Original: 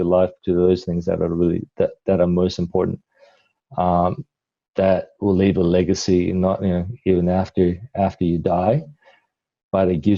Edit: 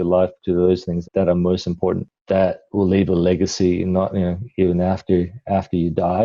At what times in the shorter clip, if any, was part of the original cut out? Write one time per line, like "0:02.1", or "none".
0:01.0
0:02.1